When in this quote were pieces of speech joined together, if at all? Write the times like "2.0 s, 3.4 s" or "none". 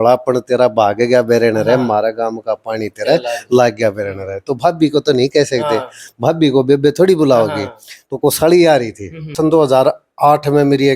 9.3 s